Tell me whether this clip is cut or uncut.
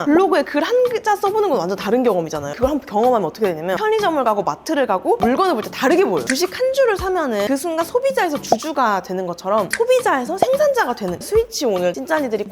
cut